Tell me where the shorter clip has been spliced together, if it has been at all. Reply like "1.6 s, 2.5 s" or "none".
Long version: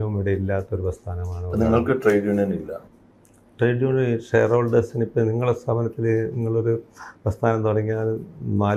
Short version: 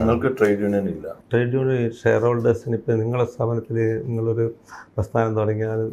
1.1 s